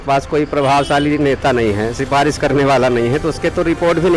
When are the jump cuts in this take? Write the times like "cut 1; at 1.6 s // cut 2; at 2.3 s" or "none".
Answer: none